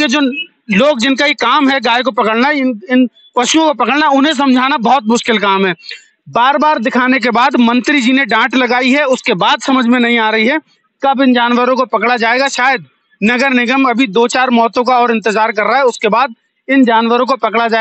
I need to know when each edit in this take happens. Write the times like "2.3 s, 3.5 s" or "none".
none